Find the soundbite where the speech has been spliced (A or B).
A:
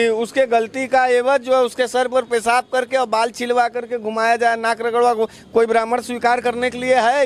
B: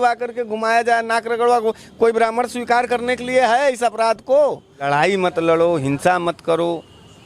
B